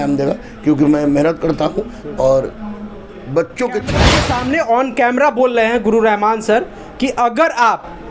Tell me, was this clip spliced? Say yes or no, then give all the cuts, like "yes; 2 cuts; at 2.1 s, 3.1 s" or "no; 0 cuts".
yes; 1 cut; at 4.0 s